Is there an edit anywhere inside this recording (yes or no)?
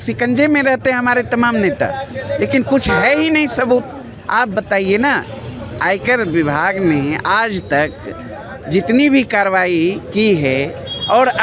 no